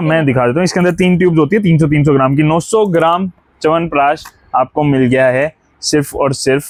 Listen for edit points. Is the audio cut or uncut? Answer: uncut